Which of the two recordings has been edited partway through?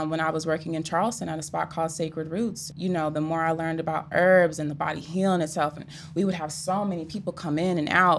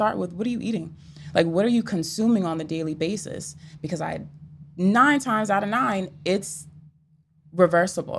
first; 1 cut; at 2.7 s

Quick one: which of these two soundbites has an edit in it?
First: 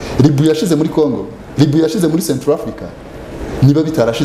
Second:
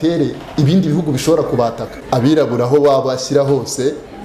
second; 1 cut; at 2.0 s

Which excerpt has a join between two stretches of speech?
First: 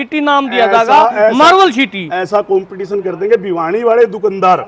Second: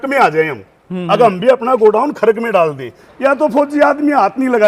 second; 1 cut; at 3.0 s

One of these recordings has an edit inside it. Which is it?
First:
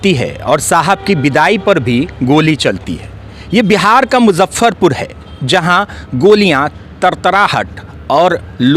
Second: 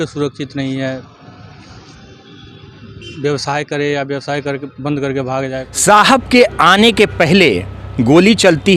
second; 1 cut; at 5.7 s

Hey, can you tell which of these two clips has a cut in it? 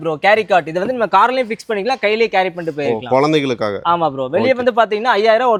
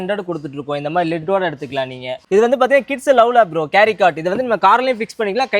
second; 1 cut; at 2.1 s

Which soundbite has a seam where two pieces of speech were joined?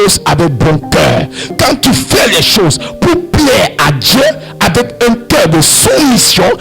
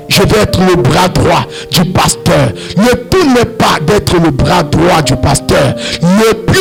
first; 1 cut; at 1.5 s

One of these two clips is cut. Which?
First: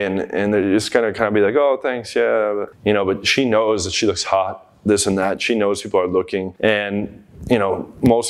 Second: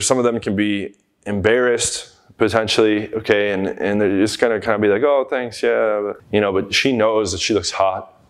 first; 1 cut; at 6.5 s

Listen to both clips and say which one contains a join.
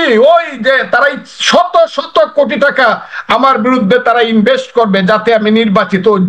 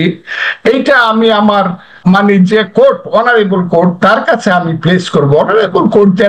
second; 1 cut; at 1.9 s

